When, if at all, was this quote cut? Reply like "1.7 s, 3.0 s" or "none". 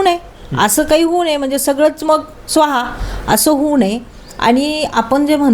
none